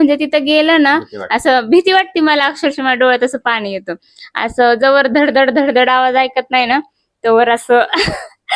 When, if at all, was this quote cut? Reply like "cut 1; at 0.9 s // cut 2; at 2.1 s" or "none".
none